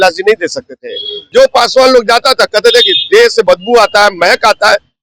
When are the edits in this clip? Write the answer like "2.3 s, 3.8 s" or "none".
1.3 s